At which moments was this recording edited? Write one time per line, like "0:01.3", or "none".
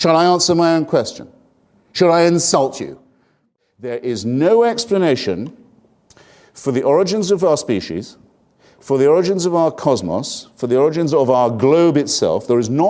none